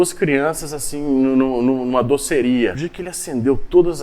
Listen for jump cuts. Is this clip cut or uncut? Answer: cut